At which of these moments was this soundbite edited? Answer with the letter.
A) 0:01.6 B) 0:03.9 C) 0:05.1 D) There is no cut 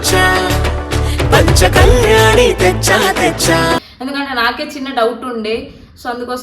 D